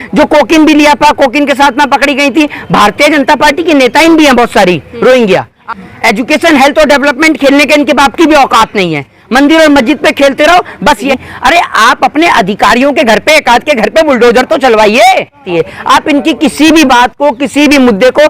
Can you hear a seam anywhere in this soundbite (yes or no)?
yes